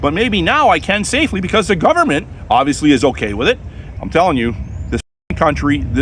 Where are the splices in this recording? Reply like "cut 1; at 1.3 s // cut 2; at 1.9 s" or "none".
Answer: cut 1; at 3.8 s